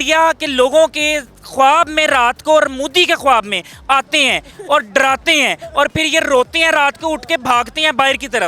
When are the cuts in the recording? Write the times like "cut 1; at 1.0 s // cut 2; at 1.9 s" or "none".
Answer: none